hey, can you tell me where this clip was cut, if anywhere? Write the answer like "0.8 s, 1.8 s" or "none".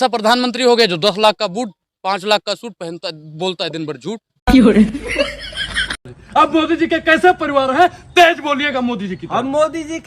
4.3 s, 6.1 s

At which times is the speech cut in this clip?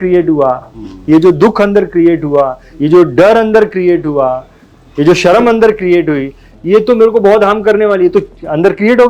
none

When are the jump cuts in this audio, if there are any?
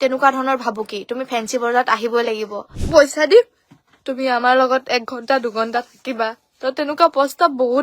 2.7 s

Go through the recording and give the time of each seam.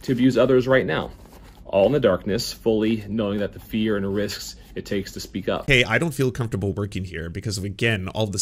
5.6 s

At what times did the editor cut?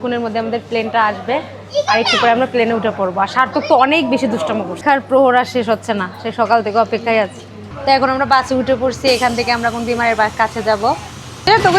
4.8 s, 7.7 s

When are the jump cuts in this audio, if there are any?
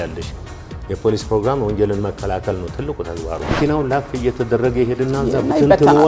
3.6 s

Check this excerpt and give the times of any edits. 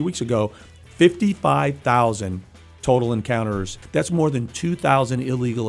3.8 s

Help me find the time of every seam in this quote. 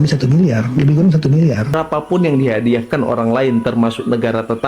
1.7 s

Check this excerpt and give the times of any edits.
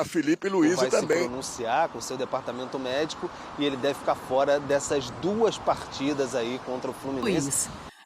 1.1 s, 7.2 s

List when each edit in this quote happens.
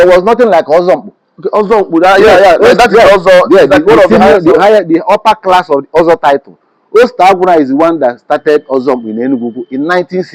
none

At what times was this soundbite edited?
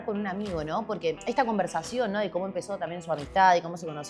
none

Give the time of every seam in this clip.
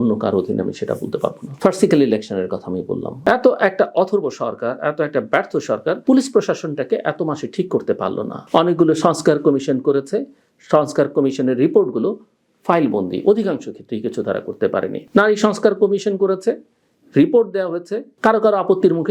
3.1 s

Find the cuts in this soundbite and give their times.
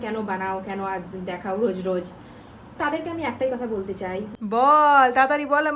4.3 s

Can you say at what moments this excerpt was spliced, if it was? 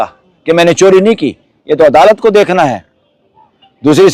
none

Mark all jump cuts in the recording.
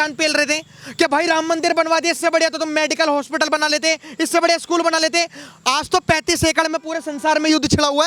none

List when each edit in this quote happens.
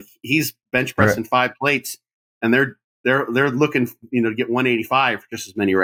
none

